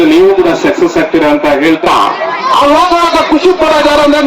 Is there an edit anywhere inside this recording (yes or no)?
yes